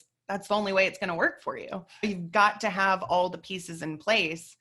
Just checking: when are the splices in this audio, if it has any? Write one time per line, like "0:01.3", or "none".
0:02.0